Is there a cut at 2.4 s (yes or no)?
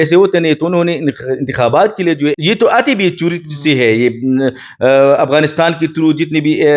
yes